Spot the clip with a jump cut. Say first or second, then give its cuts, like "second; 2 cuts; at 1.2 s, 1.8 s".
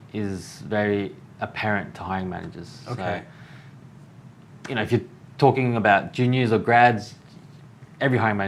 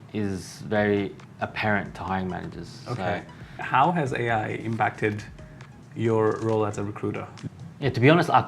second; 2 cuts; at 3.6 s, 7.3 s